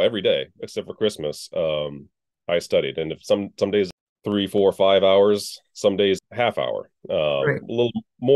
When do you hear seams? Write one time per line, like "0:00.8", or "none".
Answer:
0:03.9
0:06.2